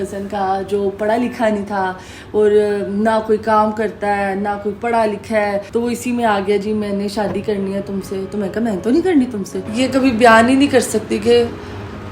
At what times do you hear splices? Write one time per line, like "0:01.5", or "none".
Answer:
0:05.7
0:09.6